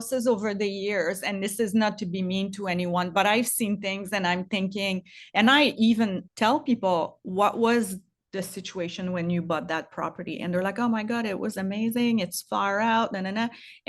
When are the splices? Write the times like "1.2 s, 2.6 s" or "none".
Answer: 6.2 s, 7.2 s